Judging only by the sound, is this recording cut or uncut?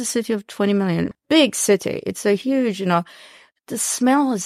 cut